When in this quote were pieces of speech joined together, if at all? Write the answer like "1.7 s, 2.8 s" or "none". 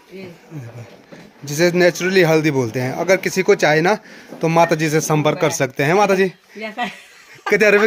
none